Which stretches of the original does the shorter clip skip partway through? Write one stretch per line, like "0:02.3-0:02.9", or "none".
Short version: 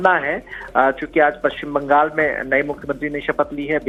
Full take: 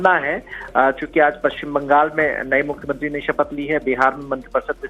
none